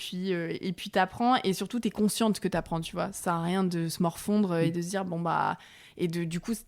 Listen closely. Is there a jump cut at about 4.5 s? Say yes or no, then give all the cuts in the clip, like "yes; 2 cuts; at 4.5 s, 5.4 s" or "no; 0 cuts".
no; 0 cuts